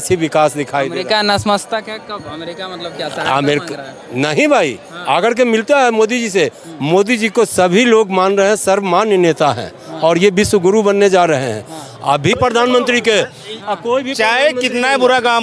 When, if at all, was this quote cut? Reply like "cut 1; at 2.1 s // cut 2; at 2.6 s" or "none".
cut 1; at 6.6 s // cut 2; at 12.4 s